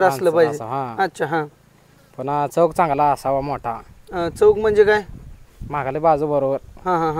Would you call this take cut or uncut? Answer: uncut